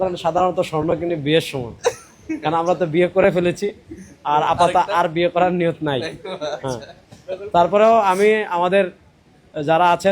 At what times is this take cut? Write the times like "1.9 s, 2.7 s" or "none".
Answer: none